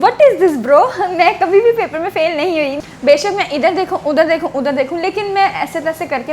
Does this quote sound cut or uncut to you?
cut